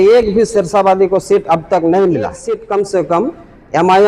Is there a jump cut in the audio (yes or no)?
yes